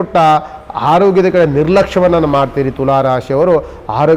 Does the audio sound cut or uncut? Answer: uncut